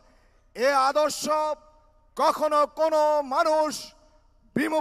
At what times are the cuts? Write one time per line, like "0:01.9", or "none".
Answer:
none